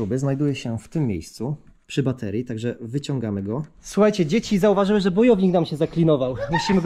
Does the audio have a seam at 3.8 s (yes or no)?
yes